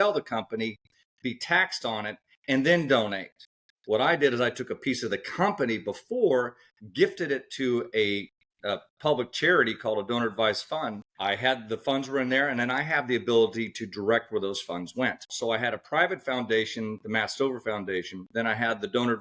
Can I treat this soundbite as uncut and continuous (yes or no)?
no